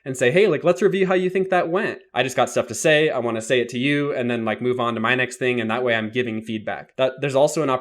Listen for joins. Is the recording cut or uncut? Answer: cut